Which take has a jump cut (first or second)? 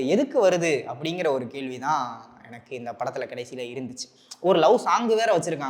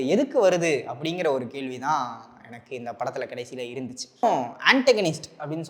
second